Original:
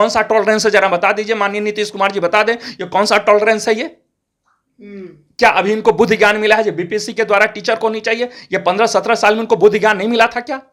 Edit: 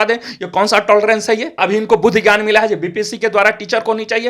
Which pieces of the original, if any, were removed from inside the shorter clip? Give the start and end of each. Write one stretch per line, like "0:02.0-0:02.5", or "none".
0:04.0-0:05.5